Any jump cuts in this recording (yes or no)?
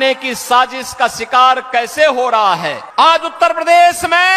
yes